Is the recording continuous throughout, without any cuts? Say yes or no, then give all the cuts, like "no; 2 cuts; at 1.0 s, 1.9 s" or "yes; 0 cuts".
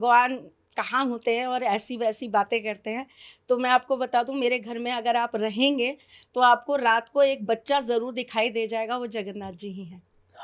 yes; 0 cuts